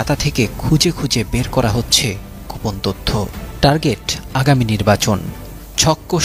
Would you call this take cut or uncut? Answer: uncut